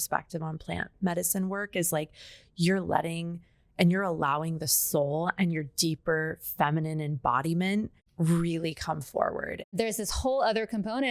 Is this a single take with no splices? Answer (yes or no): no